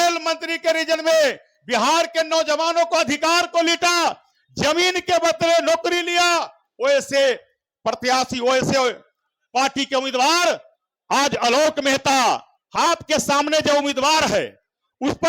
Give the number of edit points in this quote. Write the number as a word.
one